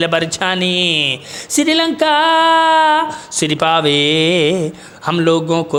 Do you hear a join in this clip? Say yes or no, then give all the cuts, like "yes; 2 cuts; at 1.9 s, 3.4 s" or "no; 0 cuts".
no; 0 cuts